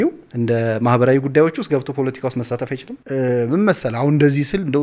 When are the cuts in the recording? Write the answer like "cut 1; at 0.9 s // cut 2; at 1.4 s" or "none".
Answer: cut 1; at 2.9 s

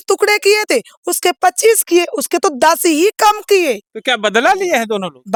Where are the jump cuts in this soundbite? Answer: none

